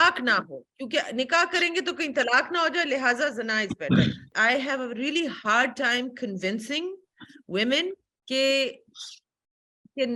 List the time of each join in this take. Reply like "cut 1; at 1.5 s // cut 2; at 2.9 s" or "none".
cut 1; at 4.3 s // cut 2; at 8.1 s